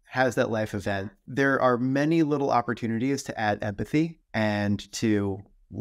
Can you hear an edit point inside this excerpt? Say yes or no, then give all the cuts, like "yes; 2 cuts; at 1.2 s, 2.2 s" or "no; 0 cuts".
yes; 2 cuts; at 1.2 s, 4.2 s